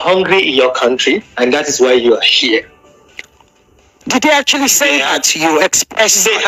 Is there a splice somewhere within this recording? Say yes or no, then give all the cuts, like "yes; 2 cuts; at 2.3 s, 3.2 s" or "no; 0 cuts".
no; 0 cuts